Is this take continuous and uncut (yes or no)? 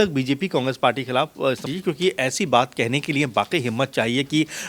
no